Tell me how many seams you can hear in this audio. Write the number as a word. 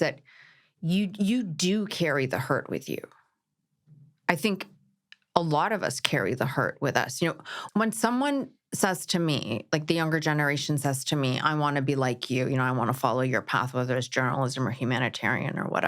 one